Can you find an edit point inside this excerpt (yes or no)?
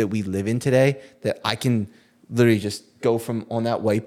no